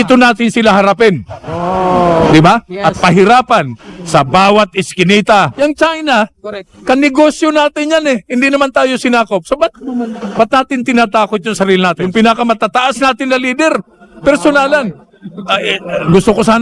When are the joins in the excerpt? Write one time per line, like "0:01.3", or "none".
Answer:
0:05.5
0:12.0